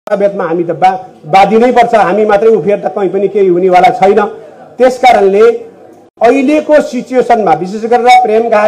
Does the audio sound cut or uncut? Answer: uncut